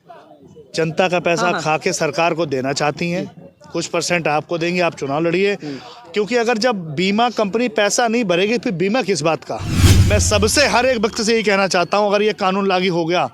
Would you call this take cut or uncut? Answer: cut